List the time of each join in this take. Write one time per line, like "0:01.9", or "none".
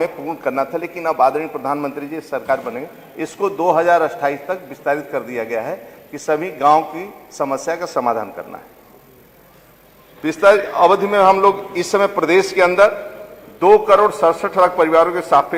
none